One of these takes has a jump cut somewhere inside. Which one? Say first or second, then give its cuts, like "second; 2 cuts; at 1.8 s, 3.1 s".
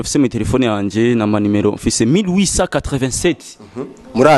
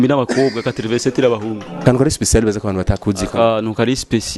second; 1 cut; at 1.8 s